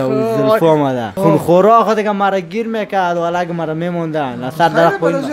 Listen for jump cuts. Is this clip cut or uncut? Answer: cut